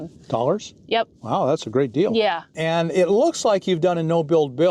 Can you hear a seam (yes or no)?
yes